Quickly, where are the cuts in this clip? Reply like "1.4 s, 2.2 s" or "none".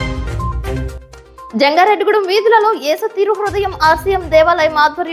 1.5 s